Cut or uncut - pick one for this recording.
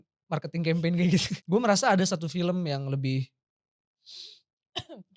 cut